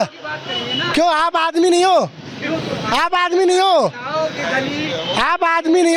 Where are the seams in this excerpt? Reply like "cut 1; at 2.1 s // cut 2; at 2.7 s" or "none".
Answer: none